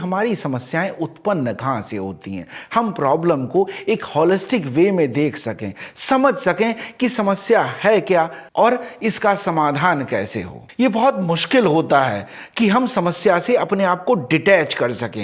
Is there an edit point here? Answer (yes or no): no